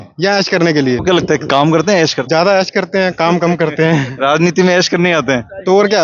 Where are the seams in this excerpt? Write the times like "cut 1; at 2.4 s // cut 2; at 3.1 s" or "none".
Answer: cut 1; at 1.0 s // cut 2; at 2.2 s